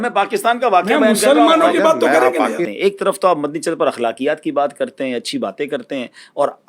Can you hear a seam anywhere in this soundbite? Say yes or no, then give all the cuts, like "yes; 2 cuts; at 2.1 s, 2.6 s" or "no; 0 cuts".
yes; 1 cut; at 2.7 s